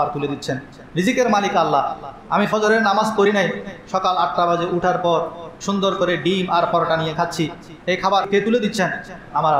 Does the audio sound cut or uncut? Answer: cut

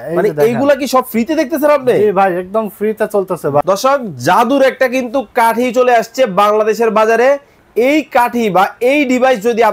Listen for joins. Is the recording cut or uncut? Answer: cut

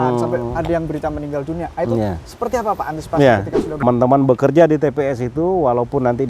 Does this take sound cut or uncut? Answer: cut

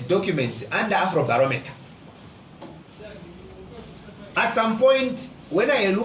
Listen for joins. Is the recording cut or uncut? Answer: cut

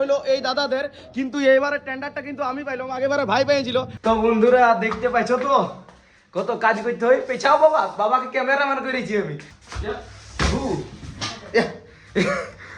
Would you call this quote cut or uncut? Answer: cut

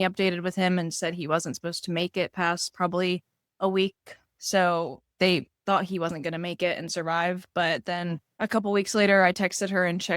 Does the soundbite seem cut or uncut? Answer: cut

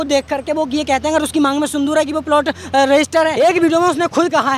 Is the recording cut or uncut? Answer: cut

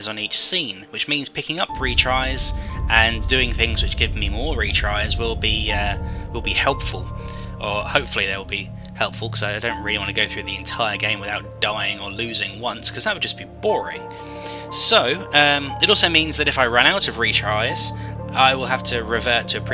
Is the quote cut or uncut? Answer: uncut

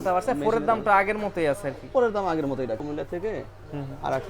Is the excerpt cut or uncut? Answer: cut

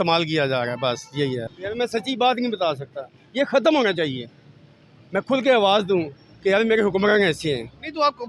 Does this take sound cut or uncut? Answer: cut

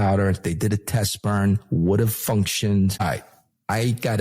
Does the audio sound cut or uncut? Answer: cut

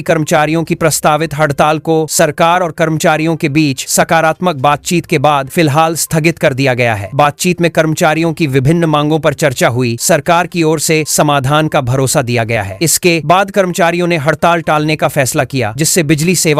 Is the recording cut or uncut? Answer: uncut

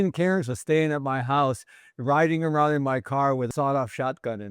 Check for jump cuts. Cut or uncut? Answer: cut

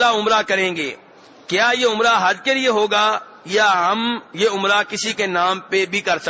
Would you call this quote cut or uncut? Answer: uncut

